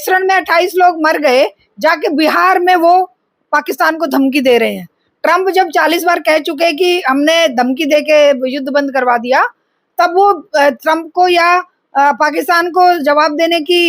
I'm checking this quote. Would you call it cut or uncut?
uncut